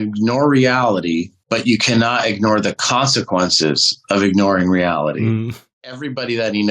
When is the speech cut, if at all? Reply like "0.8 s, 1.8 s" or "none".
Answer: 1.4 s, 5.4 s